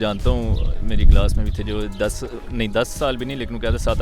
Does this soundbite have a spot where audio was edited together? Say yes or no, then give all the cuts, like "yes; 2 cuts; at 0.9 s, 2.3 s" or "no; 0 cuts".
no; 0 cuts